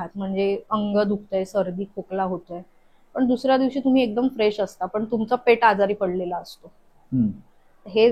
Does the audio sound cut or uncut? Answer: uncut